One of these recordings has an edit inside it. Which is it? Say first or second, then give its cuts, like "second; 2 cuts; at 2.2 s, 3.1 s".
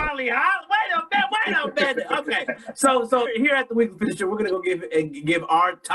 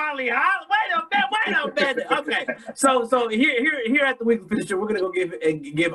first; 1 cut; at 3.3 s